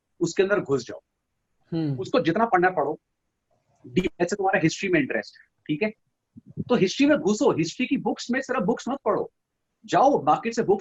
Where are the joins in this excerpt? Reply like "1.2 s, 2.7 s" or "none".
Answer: none